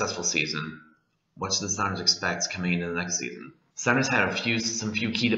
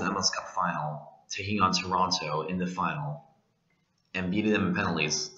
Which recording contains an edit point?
second; 1 cut; at 2.5 s

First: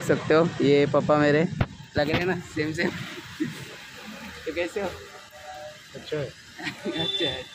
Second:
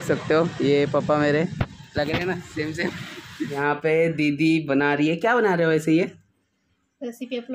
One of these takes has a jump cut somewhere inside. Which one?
second; 1 cut; at 3.6 s

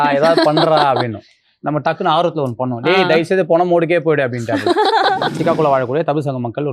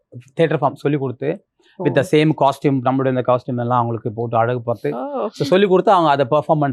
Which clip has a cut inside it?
first; 1 cut; at 5.4 s

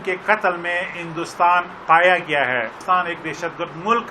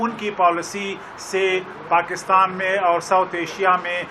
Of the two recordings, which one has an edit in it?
first; 1 cut; at 2.7 s

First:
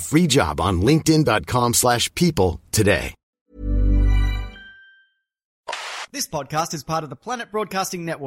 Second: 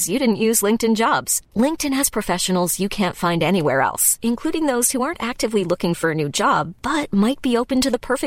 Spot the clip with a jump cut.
first; 2 cuts; at 3.2 s, 5.6 s

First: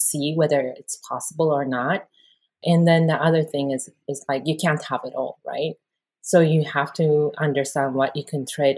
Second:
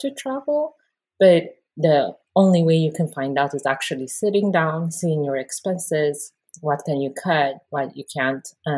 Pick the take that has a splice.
first; 1 cut; at 2.6 s

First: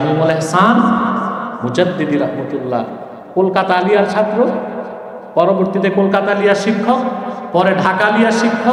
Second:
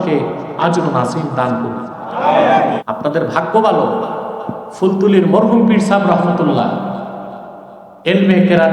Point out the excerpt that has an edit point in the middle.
second; 1 cut; at 2.8 s

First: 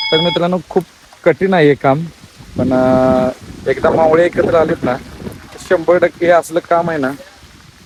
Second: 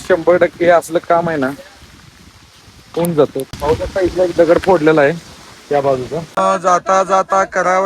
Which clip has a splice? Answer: second; 2 cuts; at 3.5 s, 6.3 s

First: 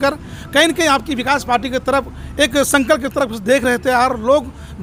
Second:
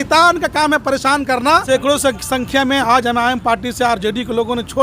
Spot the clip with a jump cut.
second; 1 cut; at 1.6 s

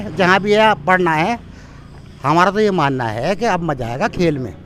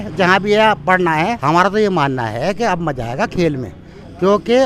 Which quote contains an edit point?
second; 1 cut; at 1.4 s

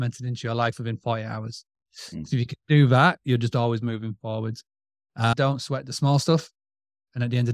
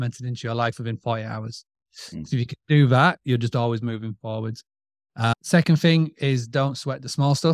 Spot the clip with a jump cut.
first; 1 cut; at 5.3 s

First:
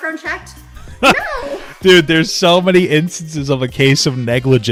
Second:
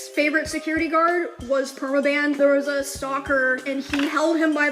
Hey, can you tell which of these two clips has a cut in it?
second; 1 cut; at 2.4 s

